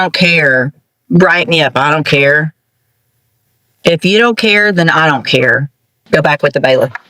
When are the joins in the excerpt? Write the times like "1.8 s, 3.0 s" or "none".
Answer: 6.2 s